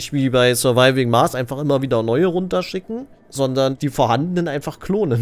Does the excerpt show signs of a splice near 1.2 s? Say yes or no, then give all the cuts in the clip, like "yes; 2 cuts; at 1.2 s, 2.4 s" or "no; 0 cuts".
no; 2 cuts; at 3.2 s, 3.8 s